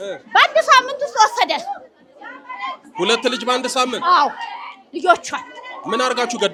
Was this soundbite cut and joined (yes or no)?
no